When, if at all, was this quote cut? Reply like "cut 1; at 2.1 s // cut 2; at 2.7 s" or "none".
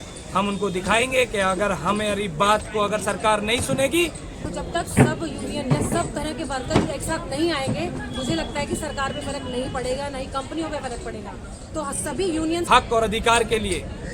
cut 1; at 4.3 s // cut 2; at 12.6 s